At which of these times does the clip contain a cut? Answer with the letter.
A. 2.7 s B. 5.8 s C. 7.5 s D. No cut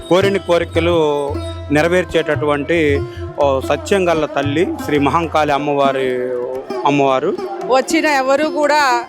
C